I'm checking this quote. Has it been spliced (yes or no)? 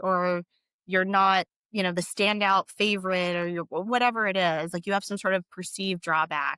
no